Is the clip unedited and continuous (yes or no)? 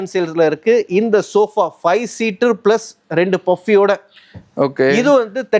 yes